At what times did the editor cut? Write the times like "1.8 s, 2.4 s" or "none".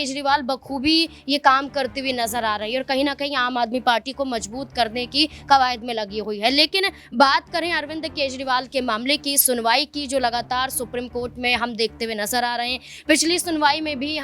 none